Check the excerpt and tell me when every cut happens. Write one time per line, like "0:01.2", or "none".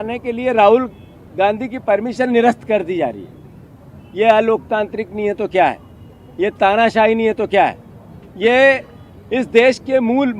none